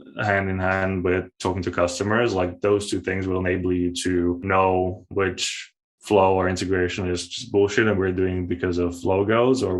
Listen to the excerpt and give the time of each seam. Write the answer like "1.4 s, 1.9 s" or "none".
4.4 s

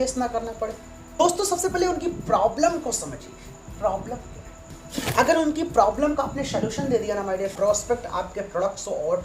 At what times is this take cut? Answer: 1.2 s, 7.5 s

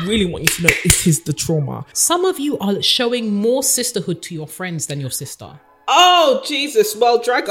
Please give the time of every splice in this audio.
1.9 s

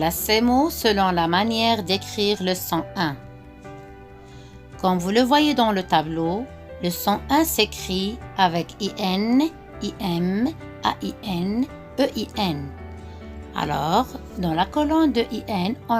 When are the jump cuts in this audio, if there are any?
3.2 s, 4.7 s

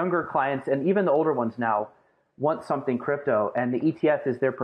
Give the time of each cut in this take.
none

